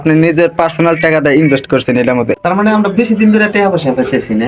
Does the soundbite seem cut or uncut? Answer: cut